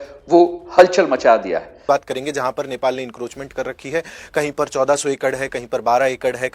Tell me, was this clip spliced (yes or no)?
yes